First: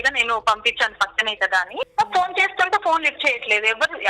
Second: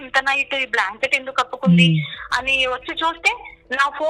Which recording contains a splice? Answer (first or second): first